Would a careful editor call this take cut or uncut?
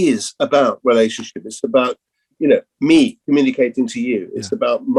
uncut